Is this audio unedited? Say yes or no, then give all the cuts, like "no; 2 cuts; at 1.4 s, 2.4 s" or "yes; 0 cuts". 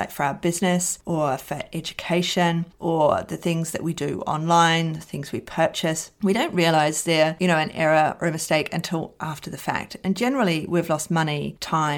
yes; 0 cuts